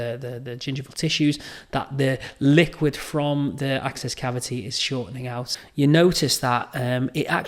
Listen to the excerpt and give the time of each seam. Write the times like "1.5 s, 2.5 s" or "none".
5.5 s